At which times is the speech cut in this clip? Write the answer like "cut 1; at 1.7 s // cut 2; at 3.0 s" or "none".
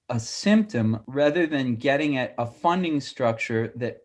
cut 1; at 1.0 s